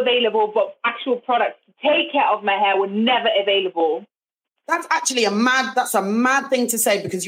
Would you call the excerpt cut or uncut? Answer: uncut